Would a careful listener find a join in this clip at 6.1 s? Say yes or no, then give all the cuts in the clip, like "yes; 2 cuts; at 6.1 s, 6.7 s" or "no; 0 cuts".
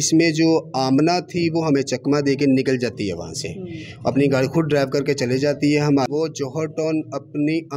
yes; 1 cut; at 6.1 s